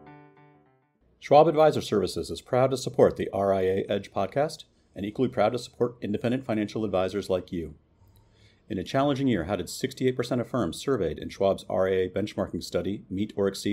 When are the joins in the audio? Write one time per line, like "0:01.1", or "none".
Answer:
0:01.3